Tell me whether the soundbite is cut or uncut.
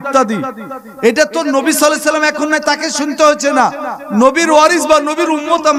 uncut